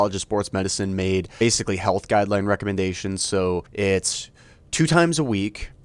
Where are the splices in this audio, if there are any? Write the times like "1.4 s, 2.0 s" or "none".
1.3 s, 3.7 s

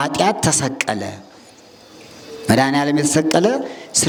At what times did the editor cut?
none

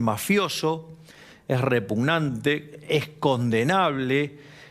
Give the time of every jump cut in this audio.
none

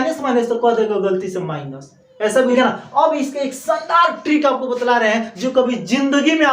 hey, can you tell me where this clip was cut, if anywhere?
2.6 s

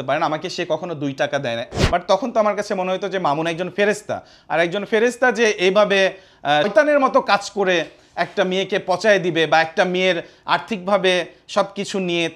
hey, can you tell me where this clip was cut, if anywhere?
1.6 s, 6.7 s

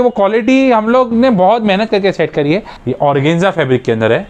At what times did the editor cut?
2.8 s

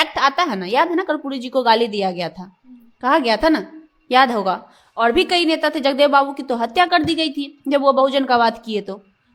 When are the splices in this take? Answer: none

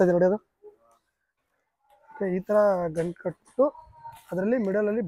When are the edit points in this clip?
1.3 s

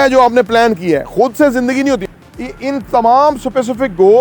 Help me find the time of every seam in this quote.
2.0 s

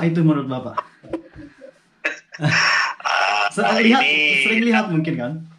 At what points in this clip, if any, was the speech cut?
none

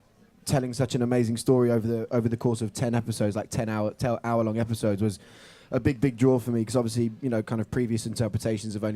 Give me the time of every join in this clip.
3.1 s

